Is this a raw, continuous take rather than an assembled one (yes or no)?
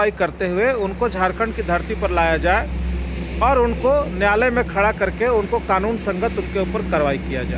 yes